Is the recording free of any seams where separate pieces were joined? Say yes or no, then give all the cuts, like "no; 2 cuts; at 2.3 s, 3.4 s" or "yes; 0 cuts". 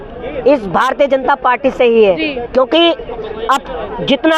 yes; 0 cuts